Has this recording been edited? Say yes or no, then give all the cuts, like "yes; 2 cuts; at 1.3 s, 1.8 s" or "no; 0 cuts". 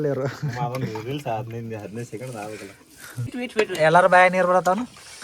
yes; 1 cut; at 3.3 s